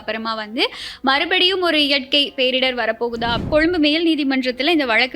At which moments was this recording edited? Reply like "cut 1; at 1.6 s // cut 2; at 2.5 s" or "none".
cut 1; at 3.4 s